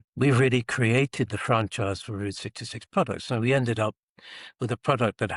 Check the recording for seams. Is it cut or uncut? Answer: uncut